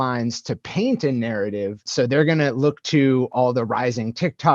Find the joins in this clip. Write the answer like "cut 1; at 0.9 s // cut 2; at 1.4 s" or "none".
cut 1; at 1.8 s // cut 2; at 3.3 s